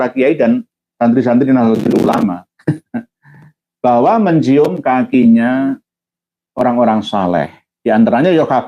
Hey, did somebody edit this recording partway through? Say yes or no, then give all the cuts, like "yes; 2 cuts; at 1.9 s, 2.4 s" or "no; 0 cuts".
no; 0 cuts